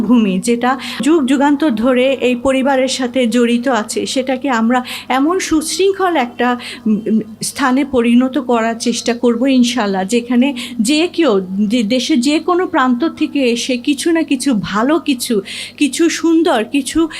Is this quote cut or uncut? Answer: cut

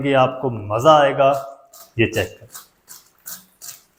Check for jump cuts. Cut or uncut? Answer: uncut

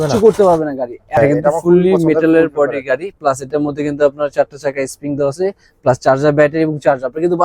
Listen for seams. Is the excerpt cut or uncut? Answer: cut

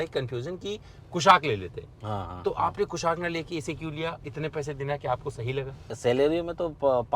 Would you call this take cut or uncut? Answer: cut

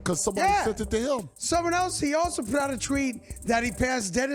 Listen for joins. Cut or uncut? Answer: uncut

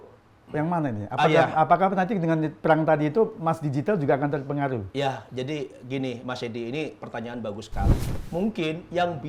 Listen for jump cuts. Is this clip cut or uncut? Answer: cut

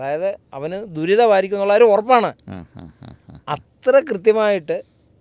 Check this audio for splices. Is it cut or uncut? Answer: uncut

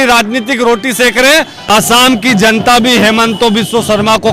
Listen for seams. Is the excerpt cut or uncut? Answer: cut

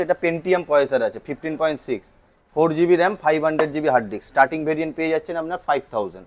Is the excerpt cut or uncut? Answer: uncut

